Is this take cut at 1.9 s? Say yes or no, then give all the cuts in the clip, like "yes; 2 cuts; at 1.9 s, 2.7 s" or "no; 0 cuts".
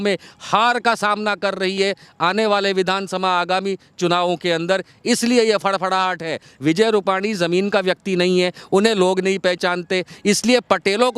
no; 0 cuts